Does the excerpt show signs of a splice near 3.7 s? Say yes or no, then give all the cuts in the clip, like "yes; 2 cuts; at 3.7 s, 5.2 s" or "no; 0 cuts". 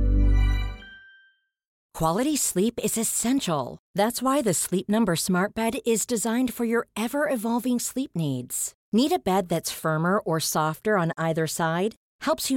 no; 1 cut; at 1.8 s